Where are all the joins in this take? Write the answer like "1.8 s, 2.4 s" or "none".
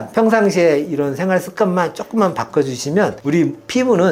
none